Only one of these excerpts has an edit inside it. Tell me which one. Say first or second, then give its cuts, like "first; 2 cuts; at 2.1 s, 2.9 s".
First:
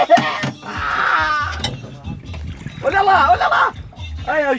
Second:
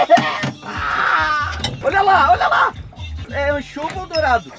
second; 2 cuts; at 1.8 s, 3.2 s